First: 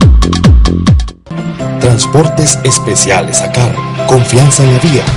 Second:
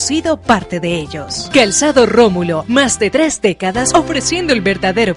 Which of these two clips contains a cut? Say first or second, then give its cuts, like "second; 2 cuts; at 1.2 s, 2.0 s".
first; 1 cut; at 1.0 s